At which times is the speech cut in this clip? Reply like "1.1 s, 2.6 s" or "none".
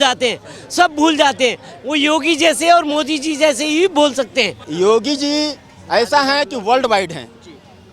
4.7 s